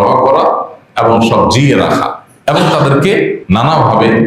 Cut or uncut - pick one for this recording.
cut